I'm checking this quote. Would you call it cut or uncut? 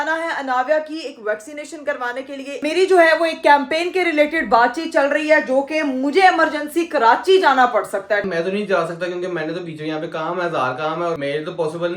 cut